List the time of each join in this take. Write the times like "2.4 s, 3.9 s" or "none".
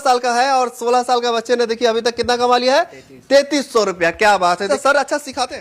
4.7 s